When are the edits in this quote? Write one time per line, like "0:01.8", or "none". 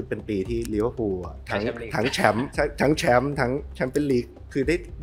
0:01.4
0:02.5